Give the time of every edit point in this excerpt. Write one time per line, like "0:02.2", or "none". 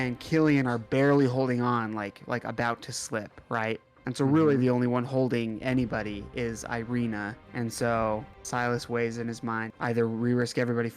0:03.9
0:07.4
0:08.4
0:09.7